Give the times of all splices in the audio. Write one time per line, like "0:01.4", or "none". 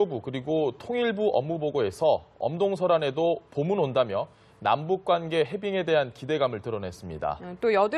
none